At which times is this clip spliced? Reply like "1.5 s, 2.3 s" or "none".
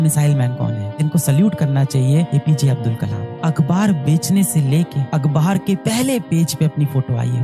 1.0 s